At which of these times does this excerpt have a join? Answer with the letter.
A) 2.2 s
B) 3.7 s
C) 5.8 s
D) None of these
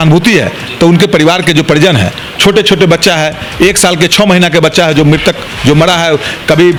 D